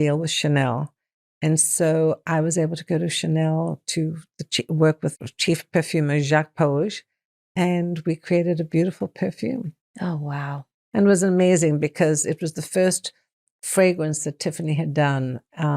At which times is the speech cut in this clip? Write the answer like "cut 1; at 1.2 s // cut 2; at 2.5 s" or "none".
cut 1; at 5.3 s // cut 2; at 9.8 s